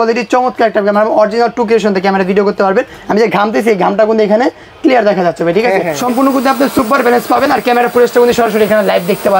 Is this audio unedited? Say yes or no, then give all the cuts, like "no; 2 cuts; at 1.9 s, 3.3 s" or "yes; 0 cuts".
no; 1 cut; at 5.9 s